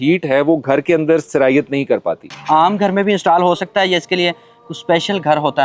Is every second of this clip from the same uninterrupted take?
no; 1 cut; at 2.3 s

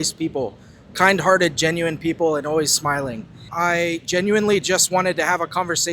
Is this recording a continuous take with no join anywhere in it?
no; 1 cut; at 3.5 s

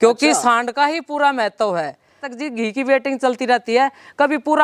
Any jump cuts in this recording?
yes; 1 cut; at 2.3 s

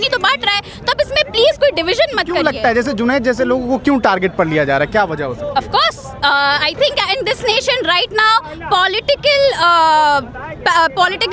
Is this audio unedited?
yes; 0 cuts

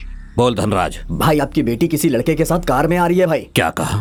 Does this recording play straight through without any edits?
yes; 0 cuts

